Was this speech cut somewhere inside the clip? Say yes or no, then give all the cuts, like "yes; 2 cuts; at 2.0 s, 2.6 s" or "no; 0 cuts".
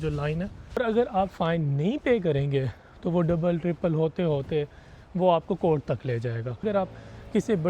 yes; 2 cuts; at 0.8 s, 6.6 s